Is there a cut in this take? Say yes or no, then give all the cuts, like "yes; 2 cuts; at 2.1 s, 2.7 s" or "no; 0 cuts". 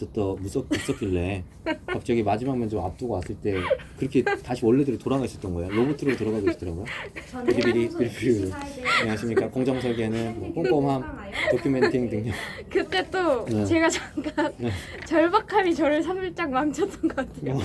no; 0 cuts